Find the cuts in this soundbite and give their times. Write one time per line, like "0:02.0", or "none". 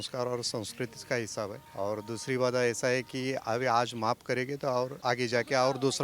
0:01.6
0:05.0

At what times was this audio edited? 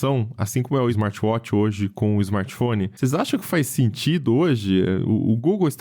0:01.0

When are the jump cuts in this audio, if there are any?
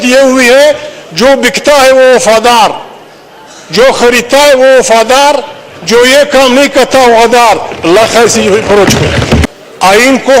0:09.4

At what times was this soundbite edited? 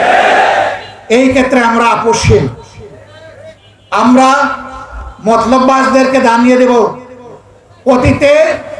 none

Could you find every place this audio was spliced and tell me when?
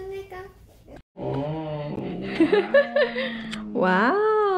0:01.0

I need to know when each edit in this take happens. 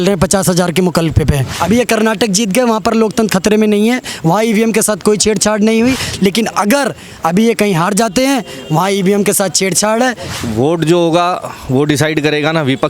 0:01.5
0:10.4

